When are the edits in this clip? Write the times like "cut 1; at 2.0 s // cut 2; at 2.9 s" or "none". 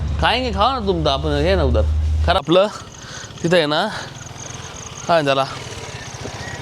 cut 1; at 2.4 s

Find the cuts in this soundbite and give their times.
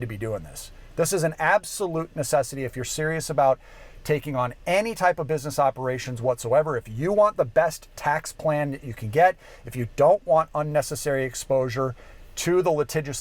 none

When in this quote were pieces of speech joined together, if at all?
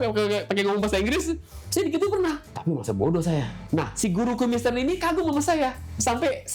cut 1; at 2.4 s // cut 2; at 3.6 s

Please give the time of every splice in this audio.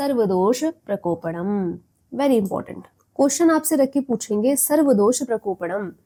none

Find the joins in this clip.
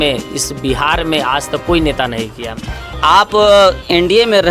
cut 1; at 3.0 s

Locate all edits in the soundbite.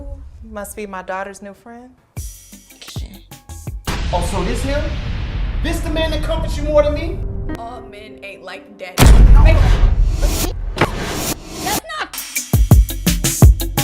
cut 1; at 2.9 s // cut 2; at 7.6 s // cut 3; at 12.3 s

